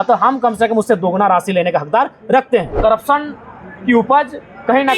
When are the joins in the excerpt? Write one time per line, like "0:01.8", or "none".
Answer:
0:02.8